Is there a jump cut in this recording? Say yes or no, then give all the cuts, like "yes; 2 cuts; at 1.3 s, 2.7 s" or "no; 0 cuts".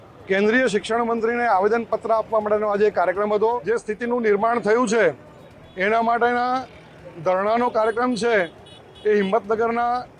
yes; 1 cut; at 3.6 s